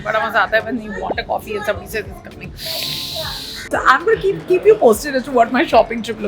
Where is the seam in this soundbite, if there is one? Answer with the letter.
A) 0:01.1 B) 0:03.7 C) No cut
B